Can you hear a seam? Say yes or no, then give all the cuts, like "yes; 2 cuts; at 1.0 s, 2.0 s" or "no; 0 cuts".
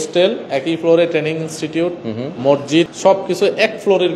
no; 0 cuts